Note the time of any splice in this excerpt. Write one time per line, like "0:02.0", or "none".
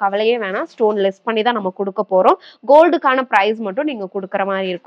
none